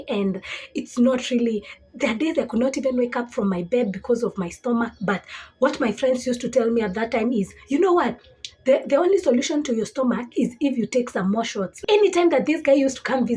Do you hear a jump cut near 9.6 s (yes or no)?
no